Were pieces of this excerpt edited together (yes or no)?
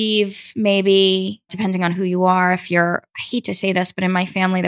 yes